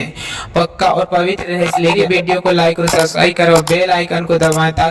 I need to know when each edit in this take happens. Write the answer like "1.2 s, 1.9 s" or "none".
1.9 s